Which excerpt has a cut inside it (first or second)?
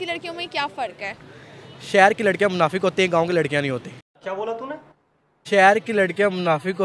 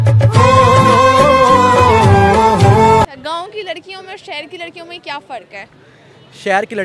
second